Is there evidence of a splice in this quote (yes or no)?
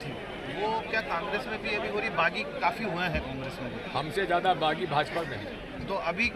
no